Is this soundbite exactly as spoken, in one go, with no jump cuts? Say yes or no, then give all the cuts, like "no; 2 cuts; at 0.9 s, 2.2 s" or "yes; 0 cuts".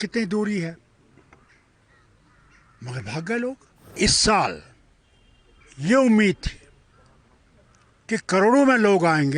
no; 1 cut; at 3.9 s